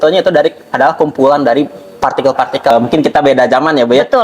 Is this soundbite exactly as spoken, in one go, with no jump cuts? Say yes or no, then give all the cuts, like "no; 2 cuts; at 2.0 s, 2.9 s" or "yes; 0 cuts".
no; 1 cut; at 2.7 s